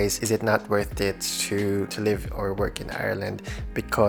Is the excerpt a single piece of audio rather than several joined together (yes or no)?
yes